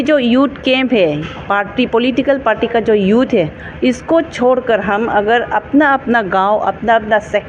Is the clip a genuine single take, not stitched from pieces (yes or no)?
yes